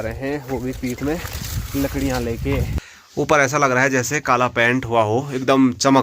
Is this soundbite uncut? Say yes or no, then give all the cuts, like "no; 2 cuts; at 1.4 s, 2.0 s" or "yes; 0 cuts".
no; 1 cut; at 3.0 s